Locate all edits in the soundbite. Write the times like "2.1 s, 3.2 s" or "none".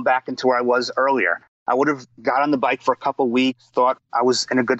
none